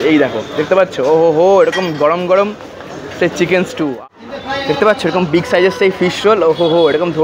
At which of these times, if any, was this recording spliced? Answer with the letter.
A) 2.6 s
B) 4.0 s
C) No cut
B